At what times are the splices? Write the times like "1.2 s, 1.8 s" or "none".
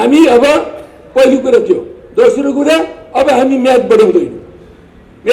none